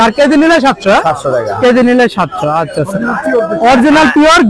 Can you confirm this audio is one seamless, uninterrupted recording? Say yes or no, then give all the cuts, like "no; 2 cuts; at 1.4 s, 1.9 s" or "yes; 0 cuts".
yes; 0 cuts